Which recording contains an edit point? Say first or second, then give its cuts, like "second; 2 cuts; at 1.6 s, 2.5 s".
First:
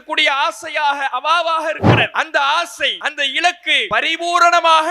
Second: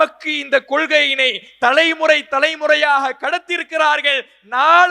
first; 3 cuts; at 2.1 s, 3.0 s, 3.8 s